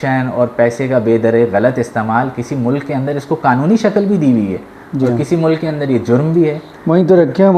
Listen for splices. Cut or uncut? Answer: uncut